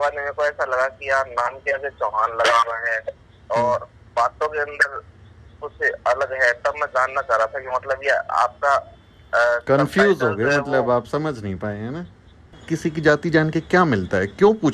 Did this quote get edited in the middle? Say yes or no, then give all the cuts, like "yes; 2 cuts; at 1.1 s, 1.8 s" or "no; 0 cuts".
yes; 1 cut; at 12.6 s